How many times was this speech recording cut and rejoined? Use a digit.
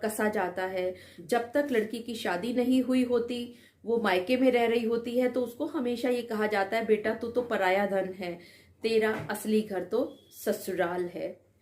1